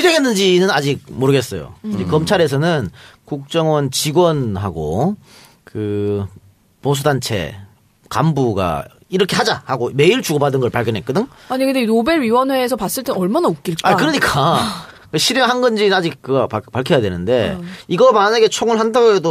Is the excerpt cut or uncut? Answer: uncut